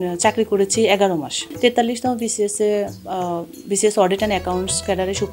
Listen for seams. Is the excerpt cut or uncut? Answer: cut